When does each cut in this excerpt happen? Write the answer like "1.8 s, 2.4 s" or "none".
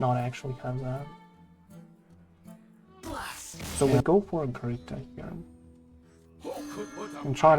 3.8 s